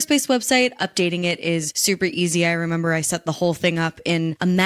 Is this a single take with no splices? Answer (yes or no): yes